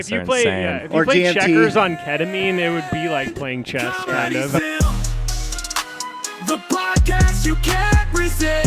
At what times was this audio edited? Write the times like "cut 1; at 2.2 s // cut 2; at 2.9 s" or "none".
cut 1; at 4.6 s